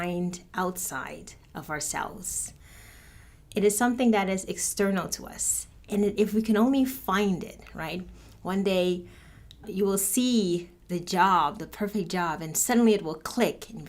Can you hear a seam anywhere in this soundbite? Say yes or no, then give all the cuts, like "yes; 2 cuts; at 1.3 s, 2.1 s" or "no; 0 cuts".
yes; 2 cuts; at 9.7 s, 10.8 s